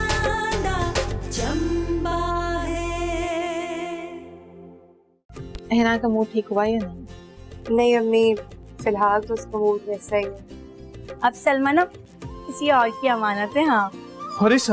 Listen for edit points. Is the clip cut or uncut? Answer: cut